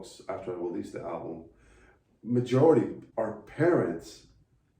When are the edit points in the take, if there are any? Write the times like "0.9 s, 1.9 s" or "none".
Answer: 3.0 s